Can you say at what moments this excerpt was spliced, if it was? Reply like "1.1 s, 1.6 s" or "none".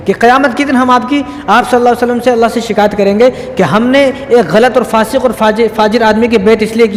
none